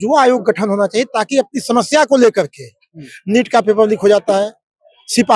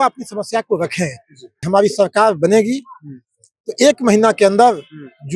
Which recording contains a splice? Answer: second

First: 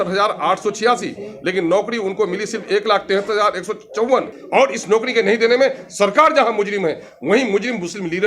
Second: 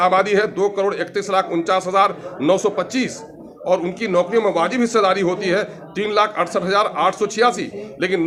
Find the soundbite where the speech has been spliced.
first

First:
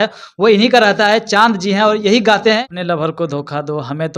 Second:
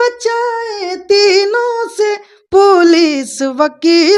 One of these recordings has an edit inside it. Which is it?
first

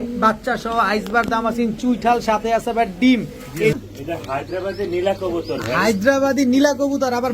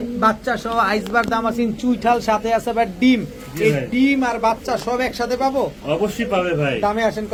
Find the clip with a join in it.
first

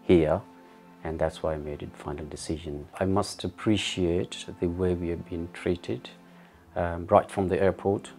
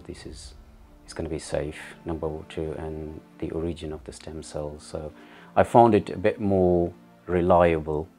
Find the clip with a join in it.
first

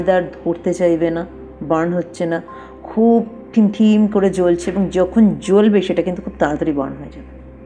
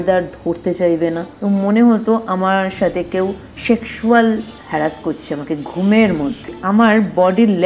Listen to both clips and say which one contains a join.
second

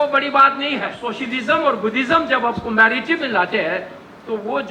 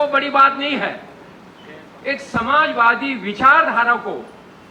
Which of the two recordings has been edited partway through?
first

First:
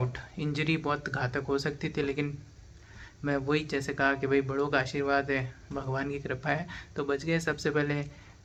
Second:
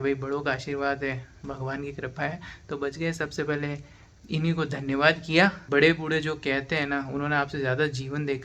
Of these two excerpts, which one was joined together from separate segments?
second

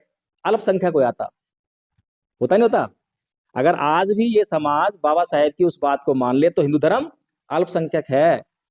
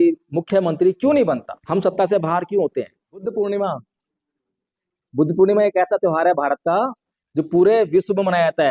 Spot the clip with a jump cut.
second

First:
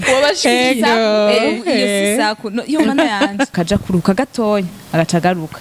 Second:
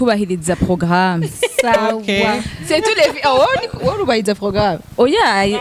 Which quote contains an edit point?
first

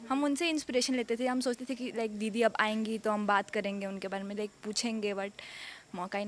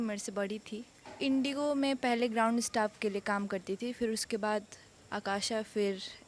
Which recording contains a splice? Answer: second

